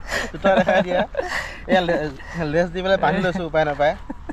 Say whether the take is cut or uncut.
uncut